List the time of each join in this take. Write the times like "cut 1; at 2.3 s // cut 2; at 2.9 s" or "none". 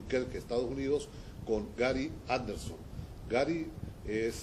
none